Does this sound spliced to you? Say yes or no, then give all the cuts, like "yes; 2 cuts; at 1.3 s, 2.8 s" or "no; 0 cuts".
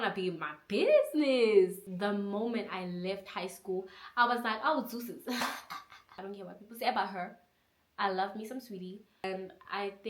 yes; 3 cuts; at 1.8 s, 6.1 s, 9.2 s